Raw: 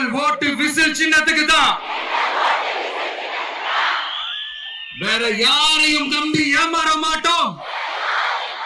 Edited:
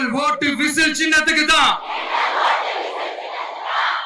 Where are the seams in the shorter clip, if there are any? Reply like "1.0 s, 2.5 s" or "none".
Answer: none

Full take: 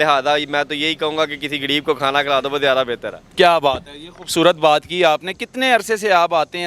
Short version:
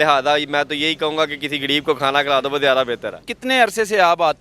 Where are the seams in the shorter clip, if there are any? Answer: 3.2 s

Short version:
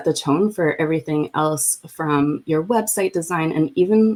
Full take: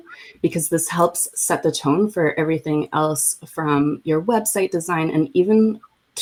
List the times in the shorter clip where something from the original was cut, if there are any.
none

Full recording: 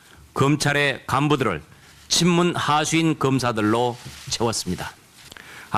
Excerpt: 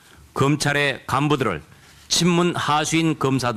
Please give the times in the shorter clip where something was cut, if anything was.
none

